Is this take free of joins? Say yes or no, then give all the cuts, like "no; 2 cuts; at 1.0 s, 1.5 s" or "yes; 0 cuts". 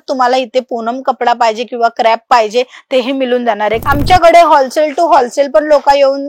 no; 1 cut; at 3.8 s